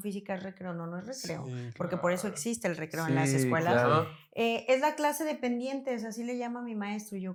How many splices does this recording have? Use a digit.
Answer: 0